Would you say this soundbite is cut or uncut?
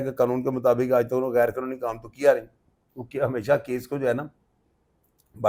uncut